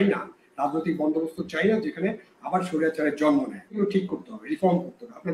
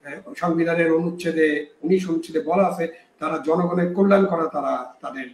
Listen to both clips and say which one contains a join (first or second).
first